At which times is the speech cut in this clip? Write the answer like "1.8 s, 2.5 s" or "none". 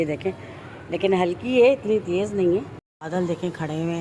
2.8 s